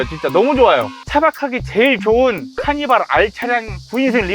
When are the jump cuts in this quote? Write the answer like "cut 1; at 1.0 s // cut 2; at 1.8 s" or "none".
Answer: cut 1; at 0.9 s

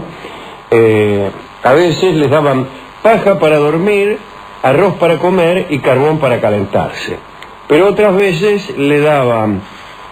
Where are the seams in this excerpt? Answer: cut 1; at 2.7 s

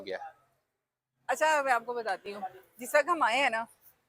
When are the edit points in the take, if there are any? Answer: none

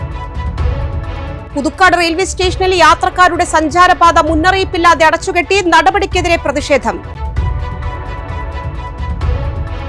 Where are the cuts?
cut 1; at 1.4 s

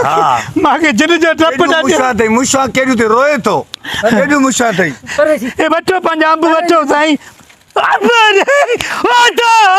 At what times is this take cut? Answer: none

